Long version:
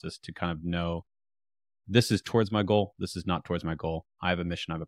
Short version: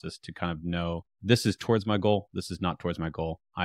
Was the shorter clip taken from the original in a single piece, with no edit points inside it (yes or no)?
no